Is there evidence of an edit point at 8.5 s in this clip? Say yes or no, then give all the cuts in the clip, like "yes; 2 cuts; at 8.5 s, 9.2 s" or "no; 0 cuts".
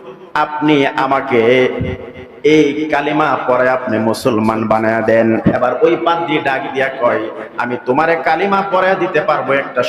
no; 1 cut; at 5.6 s